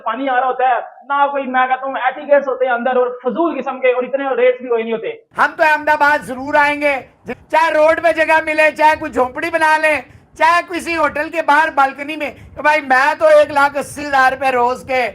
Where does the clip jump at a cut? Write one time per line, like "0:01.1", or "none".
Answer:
0:05.2